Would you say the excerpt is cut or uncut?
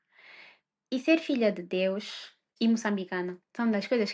cut